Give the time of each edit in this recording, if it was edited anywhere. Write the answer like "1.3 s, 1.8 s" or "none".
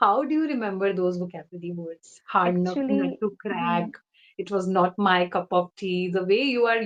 none